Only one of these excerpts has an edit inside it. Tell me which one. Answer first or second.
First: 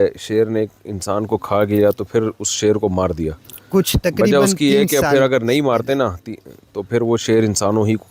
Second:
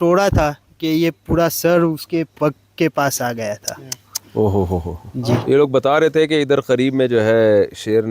second